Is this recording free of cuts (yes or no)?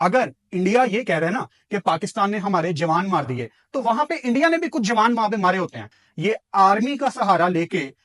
yes